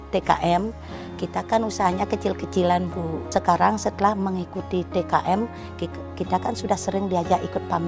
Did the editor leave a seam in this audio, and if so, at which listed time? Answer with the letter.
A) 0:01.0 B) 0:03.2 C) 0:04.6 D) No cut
B